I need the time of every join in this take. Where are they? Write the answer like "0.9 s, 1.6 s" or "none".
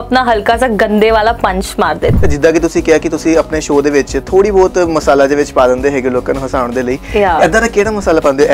2.2 s